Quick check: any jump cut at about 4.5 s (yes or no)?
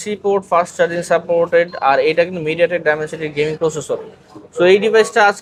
no